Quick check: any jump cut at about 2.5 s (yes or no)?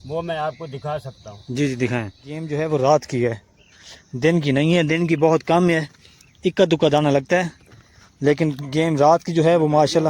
yes